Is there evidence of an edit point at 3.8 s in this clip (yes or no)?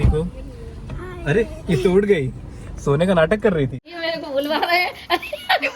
yes